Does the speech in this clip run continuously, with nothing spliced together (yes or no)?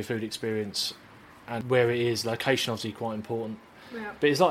no